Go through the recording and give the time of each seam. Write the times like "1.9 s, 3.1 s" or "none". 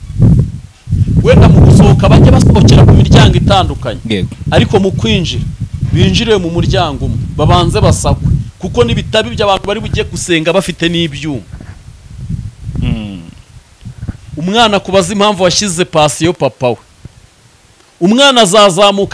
none